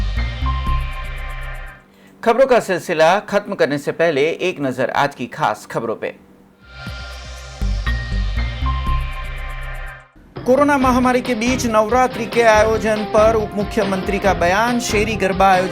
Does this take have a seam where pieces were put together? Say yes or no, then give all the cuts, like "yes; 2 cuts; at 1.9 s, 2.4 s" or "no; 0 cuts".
no; 0 cuts